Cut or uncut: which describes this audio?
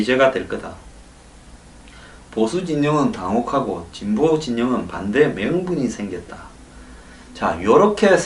cut